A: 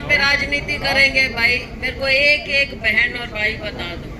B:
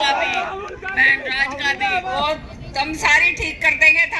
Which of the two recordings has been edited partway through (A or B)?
B